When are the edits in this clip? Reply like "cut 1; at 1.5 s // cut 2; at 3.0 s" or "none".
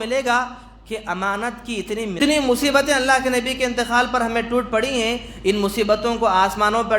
cut 1; at 2.2 s